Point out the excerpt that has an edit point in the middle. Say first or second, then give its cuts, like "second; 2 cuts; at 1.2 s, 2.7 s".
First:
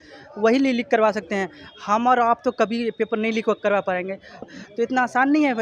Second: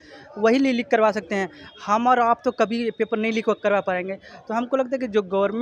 first; 1 cut; at 4.5 s